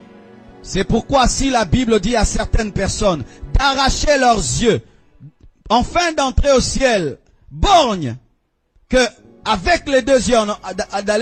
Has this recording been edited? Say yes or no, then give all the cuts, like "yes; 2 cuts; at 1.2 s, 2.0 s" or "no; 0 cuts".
no; 0 cuts